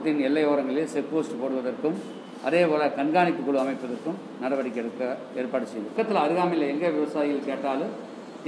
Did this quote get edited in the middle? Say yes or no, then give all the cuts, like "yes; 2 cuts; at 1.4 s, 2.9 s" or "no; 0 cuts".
yes; 1 cut; at 5.9 s